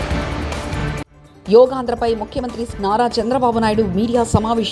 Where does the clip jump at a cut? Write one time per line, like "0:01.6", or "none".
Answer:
0:01.1

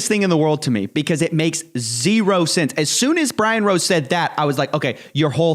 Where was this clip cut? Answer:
none

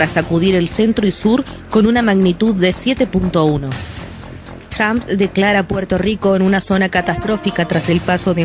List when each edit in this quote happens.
0:04.2

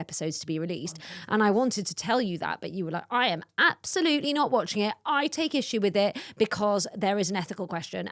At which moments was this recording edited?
none

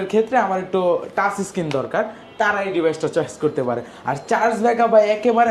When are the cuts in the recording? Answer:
none

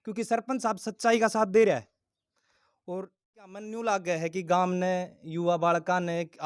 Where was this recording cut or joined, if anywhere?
0:03.7

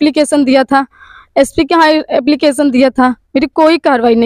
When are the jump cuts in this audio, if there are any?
none

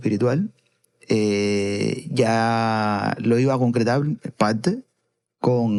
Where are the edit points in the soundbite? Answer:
none

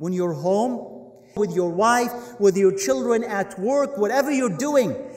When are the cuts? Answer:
0:01.3

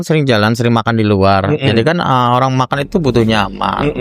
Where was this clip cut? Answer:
none

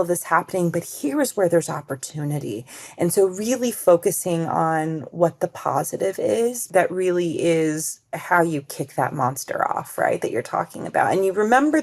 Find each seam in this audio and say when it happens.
0:06.7

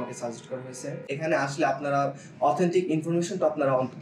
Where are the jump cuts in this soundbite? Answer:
0:01.1

